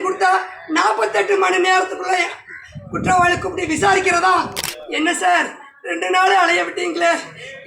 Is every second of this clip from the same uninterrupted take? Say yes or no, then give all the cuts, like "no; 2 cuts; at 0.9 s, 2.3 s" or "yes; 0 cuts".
no; 1 cut; at 4.6 s